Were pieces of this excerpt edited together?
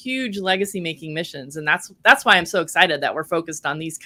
no; 0 cuts

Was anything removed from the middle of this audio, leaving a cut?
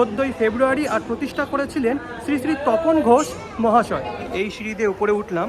yes; 1 cut; at 4.3 s

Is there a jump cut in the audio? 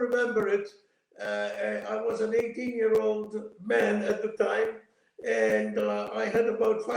no; 0 cuts

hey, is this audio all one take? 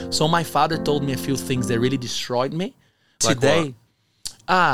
no; 1 cut; at 3.2 s

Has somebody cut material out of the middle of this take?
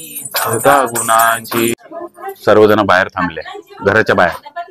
yes; 1 cut; at 1.7 s

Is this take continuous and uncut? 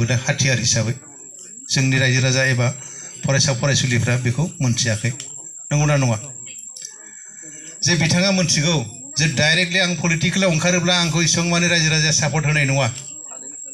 yes; 0 cuts

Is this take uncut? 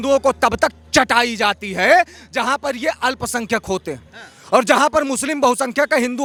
yes; 0 cuts

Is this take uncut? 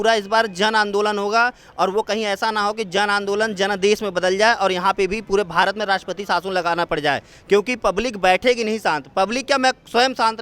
yes; 0 cuts

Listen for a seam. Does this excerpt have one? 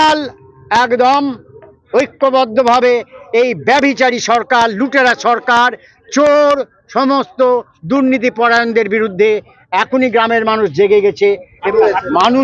yes; 1 cut; at 11.5 s

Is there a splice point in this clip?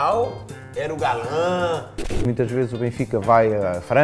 yes; 1 cut; at 2.2 s

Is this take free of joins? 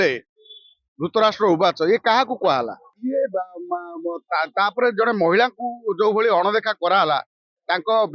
no; 1 cut; at 2.9 s

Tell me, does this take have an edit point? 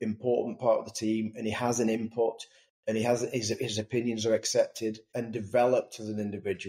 yes; 1 cut; at 5.1 s

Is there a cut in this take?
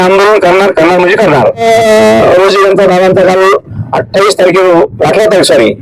yes; 1 cut; at 1.6 s

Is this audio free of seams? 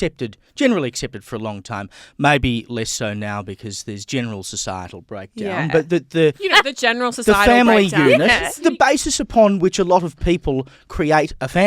no; 2 cuts; at 6.4 s, 8.6 s

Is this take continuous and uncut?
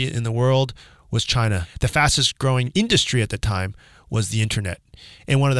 no; 2 cuts; at 1.7 s, 2.7 s

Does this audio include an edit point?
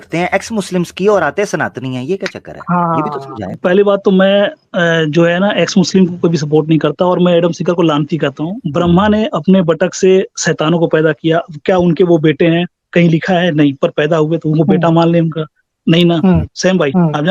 yes; 2 cuts; at 3.6 s, 8.5 s

